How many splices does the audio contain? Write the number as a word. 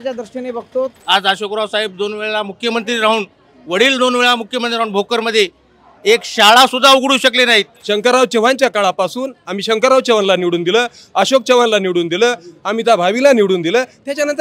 two